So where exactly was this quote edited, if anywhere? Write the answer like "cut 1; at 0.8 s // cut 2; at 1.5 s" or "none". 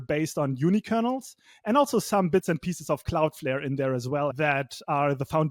cut 1; at 4.3 s

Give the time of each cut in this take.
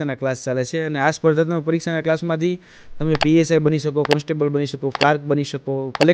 none

